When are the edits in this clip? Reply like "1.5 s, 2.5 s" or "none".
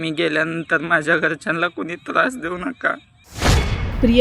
3.1 s